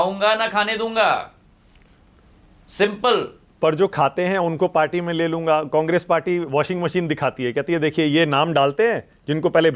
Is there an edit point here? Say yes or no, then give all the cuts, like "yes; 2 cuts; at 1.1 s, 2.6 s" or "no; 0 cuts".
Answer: no; 0 cuts